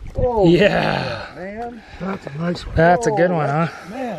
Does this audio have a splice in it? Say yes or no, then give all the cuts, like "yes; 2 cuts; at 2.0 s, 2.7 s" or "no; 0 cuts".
no; 0 cuts